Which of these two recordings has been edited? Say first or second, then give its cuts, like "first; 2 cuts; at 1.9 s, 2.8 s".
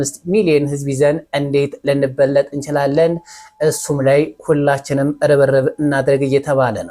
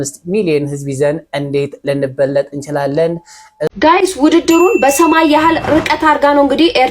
second; 1 cut; at 3.7 s